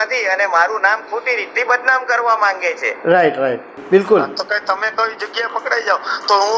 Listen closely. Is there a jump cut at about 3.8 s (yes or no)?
yes